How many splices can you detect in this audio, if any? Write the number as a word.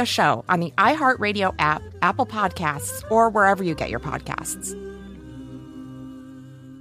one